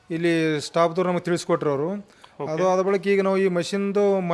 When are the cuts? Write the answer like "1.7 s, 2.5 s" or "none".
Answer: none